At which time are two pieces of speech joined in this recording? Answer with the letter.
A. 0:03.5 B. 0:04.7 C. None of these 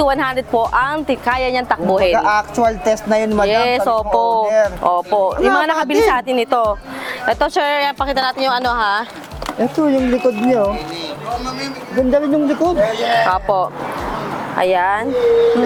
C